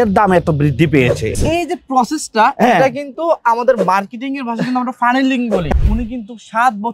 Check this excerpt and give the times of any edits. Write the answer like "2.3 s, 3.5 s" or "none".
1.3 s, 5.7 s